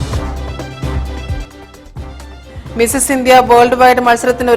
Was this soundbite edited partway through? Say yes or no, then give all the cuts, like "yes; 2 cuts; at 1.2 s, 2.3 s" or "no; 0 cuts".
yes; 1 cut; at 2.4 s